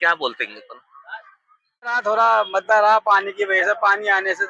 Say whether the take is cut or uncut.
uncut